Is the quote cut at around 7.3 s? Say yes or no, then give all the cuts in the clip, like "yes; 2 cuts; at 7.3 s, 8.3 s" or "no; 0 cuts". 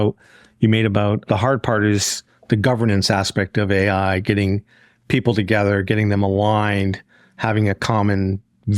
no; 1 cut; at 1.2 s